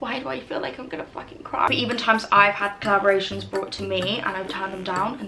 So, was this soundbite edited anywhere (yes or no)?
yes